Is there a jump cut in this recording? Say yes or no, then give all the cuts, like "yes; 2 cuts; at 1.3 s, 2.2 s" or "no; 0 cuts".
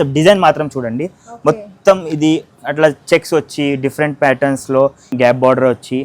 yes; 1 cut; at 5.0 s